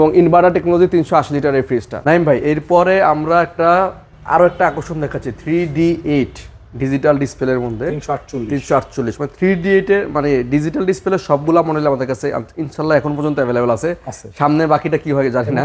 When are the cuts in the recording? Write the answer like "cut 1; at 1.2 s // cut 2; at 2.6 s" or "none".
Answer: none

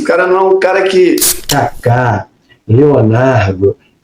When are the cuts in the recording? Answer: cut 1; at 1.4 s

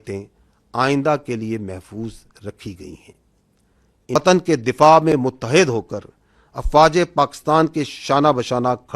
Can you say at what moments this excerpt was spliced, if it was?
cut 1; at 4.2 s

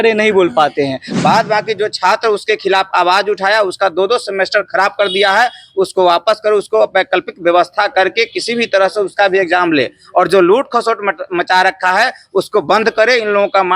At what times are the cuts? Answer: cut 1; at 1.1 s

